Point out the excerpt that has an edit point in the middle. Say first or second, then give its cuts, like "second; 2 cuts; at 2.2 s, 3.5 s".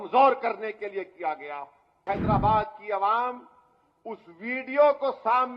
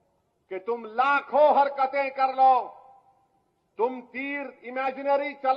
first; 1 cut; at 2.0 s